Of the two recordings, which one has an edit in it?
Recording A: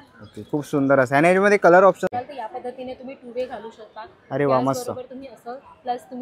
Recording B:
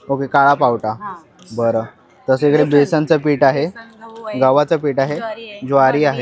A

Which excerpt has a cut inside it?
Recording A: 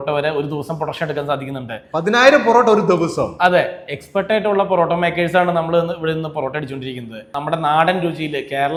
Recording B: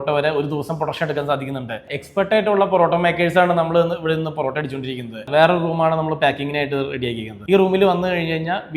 B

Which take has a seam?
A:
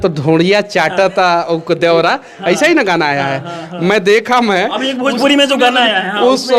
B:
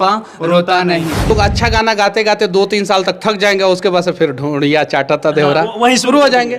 B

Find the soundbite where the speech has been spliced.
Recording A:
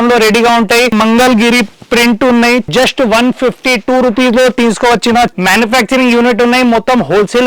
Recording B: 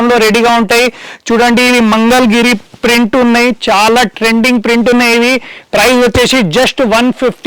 A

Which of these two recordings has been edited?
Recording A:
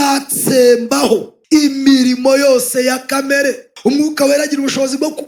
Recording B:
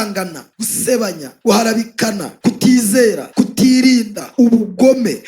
B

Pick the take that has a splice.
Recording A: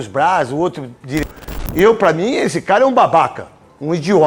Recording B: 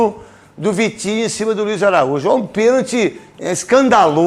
A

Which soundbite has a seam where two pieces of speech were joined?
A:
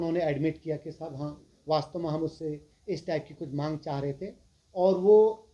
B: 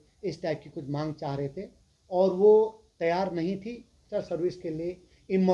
B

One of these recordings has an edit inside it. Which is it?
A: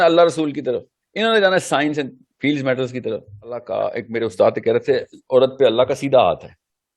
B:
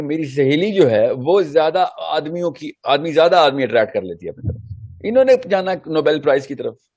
A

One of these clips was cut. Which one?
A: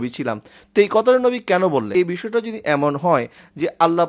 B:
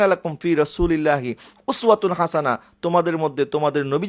A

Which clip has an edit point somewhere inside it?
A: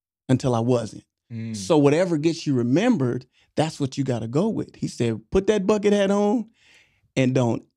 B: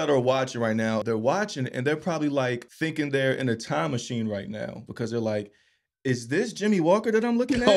B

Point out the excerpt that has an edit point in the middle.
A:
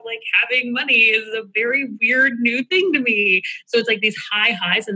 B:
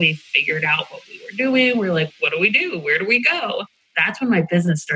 B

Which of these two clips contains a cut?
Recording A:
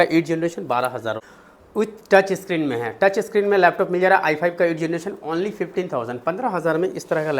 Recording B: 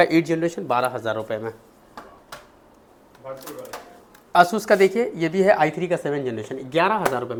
A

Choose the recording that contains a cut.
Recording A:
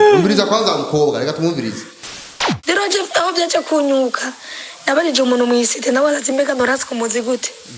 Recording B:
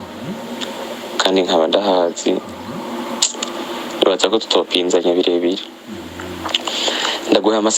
A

